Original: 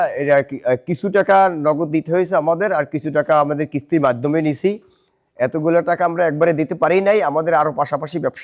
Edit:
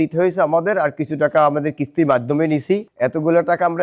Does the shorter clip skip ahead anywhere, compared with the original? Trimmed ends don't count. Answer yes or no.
yes